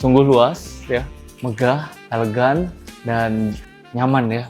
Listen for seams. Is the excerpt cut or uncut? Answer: uncut